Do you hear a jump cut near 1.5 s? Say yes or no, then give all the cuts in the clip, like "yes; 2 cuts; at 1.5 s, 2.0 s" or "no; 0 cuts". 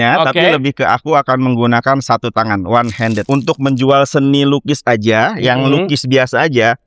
no; 1 cut; at 3.2 s